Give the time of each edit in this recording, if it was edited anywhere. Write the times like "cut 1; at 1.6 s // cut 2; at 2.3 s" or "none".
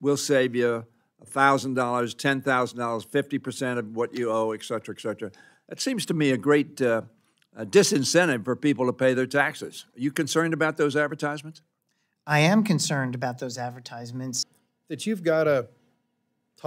cut 1; at 14.5 s